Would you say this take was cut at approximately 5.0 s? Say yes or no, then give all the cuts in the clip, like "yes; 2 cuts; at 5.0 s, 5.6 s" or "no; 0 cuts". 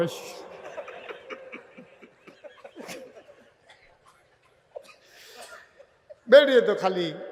no; 0 cuts